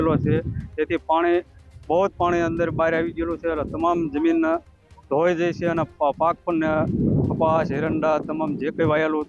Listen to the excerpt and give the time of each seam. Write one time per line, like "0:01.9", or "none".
none